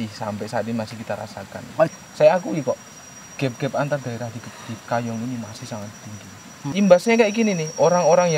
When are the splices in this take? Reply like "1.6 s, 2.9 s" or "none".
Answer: 1.9 s, 6.5 s